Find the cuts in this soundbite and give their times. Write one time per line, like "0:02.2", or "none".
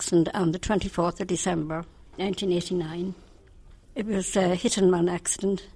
none